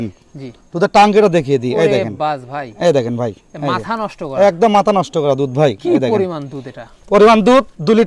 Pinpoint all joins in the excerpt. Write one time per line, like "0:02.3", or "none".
none